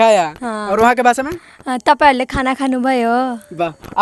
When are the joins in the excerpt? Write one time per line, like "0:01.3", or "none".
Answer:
none